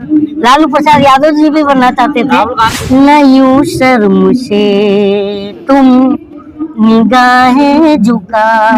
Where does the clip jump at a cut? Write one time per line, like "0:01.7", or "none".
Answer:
0:02.7